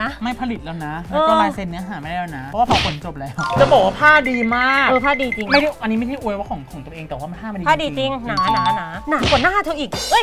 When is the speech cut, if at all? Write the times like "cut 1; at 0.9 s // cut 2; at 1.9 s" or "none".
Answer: none